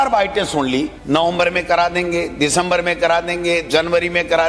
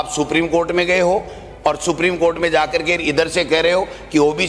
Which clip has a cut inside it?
first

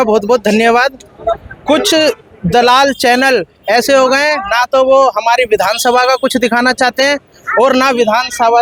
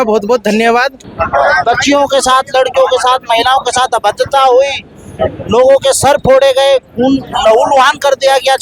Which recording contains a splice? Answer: second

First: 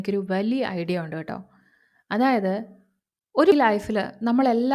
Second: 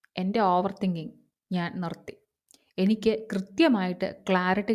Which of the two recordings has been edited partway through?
first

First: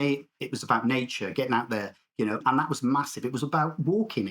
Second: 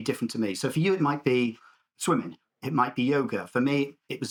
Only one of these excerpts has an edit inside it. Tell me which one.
first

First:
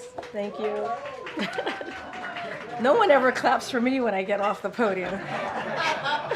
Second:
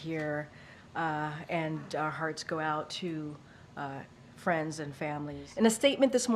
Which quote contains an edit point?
second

